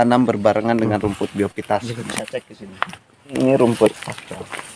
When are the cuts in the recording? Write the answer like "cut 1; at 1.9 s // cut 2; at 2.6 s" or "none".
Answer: cut 1; at 3.3 s